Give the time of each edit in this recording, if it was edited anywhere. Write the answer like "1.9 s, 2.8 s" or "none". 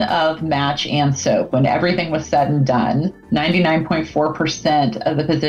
3.2 s